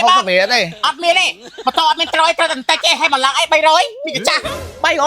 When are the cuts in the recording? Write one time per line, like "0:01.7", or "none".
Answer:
none